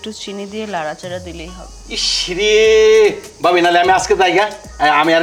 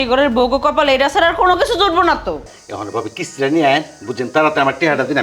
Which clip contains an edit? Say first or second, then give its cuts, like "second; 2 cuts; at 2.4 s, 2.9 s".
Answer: second; 1 cut; at 2.5 s